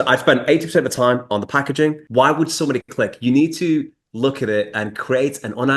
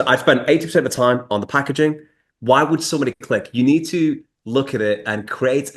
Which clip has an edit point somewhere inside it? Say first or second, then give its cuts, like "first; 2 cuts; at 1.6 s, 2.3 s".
first; 1 cut; at 2.0 s